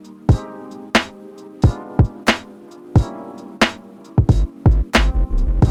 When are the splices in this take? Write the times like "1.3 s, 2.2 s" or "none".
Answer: none